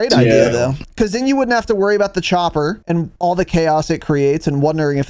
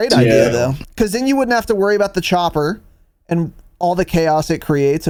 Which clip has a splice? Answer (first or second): first